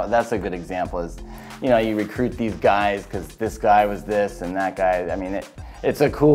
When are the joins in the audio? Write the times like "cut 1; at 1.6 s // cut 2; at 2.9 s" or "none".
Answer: none